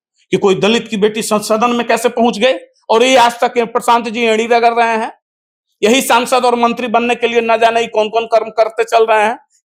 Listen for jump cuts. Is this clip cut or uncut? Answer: uncut